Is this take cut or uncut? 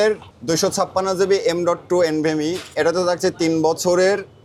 uncut